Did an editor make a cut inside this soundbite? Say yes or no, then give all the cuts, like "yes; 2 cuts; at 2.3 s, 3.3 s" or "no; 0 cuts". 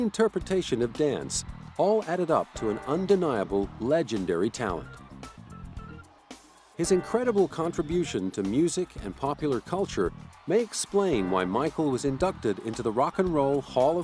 no; 0 cuts